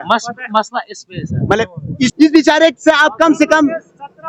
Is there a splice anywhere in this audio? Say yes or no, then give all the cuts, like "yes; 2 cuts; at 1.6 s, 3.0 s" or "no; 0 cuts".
yes; 1 cut; at 2.1 s